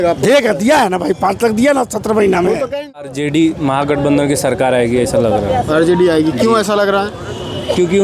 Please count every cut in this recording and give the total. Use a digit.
1